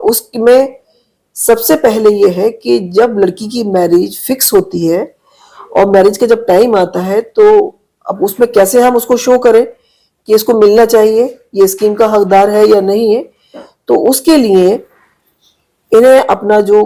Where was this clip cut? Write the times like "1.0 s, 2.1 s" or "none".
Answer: none